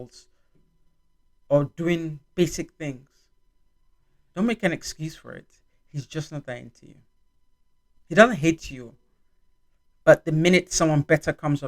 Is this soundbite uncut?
yes; 0 cuts

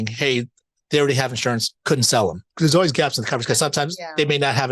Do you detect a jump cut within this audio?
yes; 2 cuts; at 1.7 s, 2.5 s

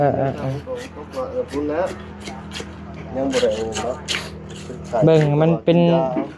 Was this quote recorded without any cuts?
yes; 0 cuts

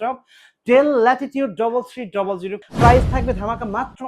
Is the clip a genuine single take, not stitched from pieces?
no; 1 cut; at 2.6 s

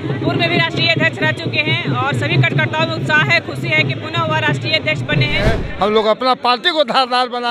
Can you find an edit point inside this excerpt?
yes; 1 cut; at 5.6 s

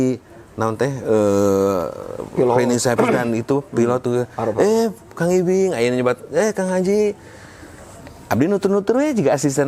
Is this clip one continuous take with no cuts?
yes; 0 cuts

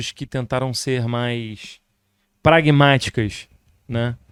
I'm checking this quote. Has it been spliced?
no; 0 cuts

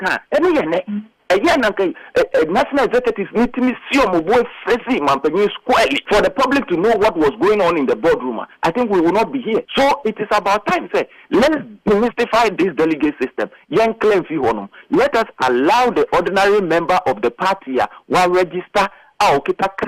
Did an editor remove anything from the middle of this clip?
yes; 2 cuts; at 6.0 s, 9.7 s

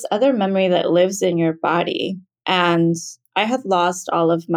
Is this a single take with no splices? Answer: no; 1 cut; at 2.3 s

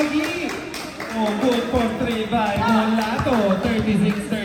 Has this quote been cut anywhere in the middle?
no; 0 cuts

